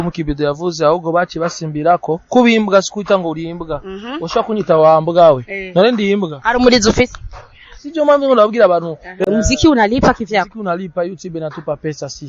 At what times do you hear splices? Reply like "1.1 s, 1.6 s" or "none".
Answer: 9.2 s